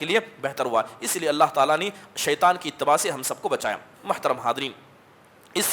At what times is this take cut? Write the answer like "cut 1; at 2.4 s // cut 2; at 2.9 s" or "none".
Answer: none